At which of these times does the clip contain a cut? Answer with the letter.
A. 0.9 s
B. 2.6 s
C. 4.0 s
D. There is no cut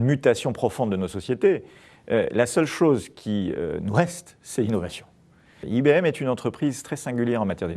C